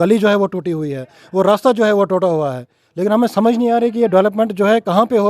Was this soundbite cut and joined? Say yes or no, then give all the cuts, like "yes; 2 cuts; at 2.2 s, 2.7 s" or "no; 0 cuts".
no; 0 cuts